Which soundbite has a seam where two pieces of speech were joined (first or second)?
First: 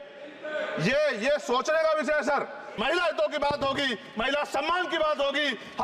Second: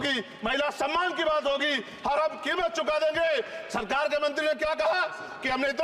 first